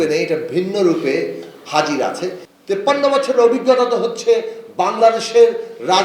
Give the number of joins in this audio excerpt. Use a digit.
1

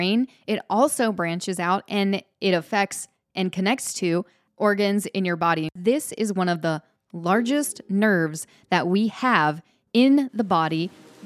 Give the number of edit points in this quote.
1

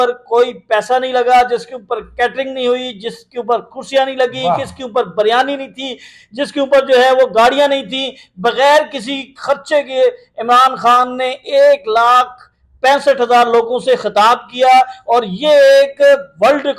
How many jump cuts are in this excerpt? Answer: 0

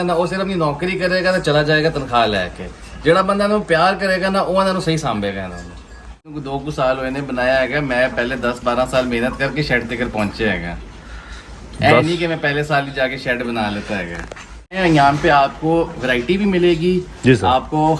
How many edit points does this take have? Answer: 2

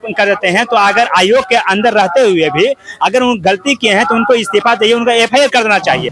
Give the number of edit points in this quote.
0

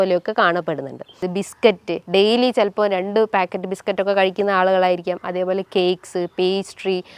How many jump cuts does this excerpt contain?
1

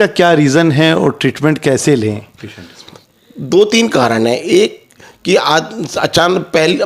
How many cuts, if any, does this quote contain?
0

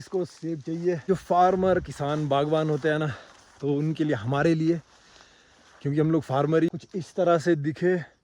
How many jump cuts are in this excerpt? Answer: 2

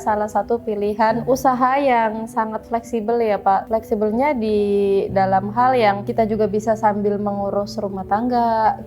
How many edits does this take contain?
3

